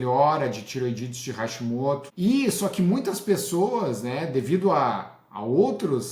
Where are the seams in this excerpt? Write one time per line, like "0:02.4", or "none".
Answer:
0:02.1

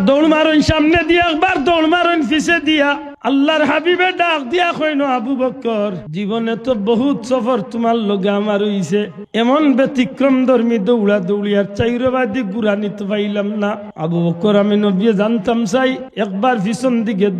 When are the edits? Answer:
0:03.1
0:06.0
0:09.2
0:13.9
0:16.1

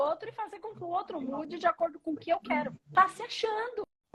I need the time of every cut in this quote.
0:02.8

